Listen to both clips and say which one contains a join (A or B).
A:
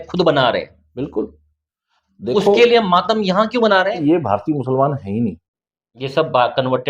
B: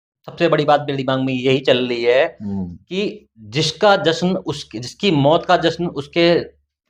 A